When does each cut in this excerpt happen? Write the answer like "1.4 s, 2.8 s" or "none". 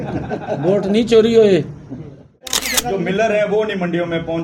2.6 s

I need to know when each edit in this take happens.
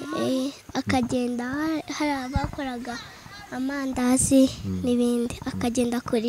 none

